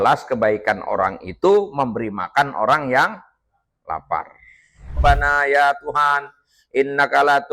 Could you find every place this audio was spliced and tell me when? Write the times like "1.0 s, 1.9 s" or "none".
5.0 s